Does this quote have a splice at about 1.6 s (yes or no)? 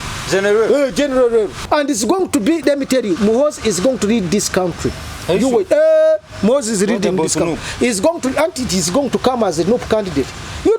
yes